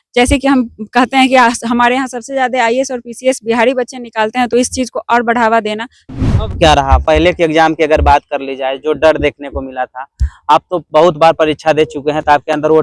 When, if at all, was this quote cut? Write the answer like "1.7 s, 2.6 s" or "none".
5.9 s